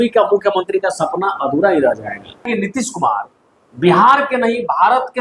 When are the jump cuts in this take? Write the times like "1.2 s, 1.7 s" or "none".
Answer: 2.5 s